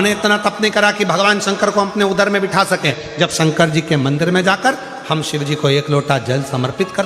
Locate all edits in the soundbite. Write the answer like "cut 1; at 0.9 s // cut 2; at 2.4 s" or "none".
cut 1; at 3.0 s